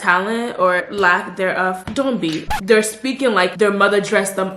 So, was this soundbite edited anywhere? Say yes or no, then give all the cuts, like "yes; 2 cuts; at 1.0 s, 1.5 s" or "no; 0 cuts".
yes; 2 cuts; at 0.8 s, 2.5 s